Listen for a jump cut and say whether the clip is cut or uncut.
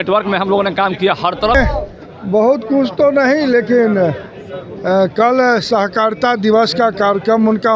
cut